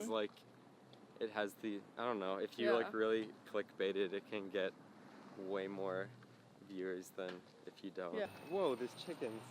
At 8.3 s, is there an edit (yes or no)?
yes